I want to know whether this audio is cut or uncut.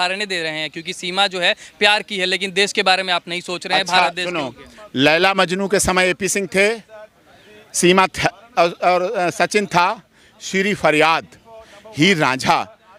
uncut